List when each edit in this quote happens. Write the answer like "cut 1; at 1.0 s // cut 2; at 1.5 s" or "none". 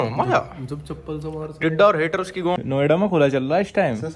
cut 1; at 2.6 s